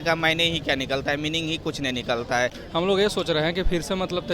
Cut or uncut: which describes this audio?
cut